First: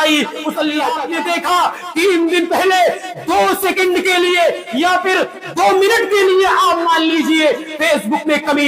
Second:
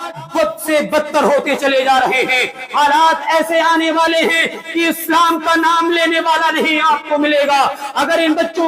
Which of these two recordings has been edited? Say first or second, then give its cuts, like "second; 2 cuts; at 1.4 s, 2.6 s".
first; 1 cut; at 1.1 s